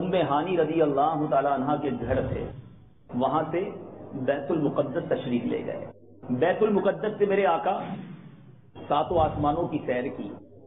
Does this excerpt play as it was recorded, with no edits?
yes; 0 cuts

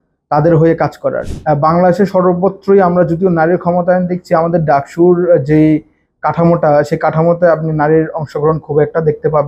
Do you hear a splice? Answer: yes; 1 cut; at 1.3 s

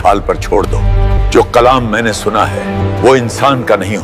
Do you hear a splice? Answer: yes; 2 cuts; at 1.2 s, 2.8 s

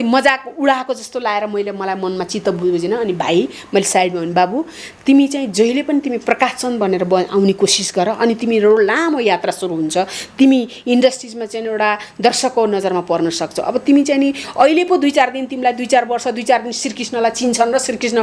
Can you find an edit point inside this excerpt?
no; 0 cuts

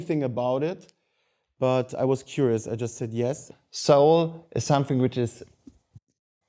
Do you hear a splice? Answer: yes; 1 cut; at 3.5 s

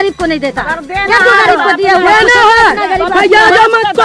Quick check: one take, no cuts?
yes; 0 cuts

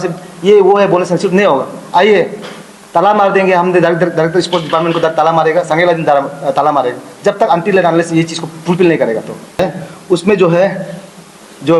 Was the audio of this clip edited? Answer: yes; 1 cut; at 9.6 s

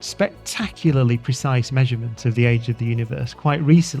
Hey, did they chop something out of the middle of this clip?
no; 0 cuts

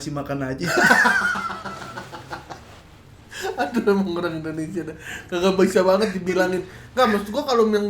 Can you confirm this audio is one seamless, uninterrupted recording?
yes; 0 cuts

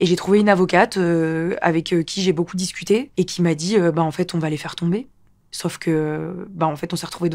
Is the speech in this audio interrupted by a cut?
no; 0 cuts

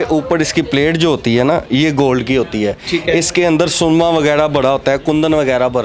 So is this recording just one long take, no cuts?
yes; 0 cuts

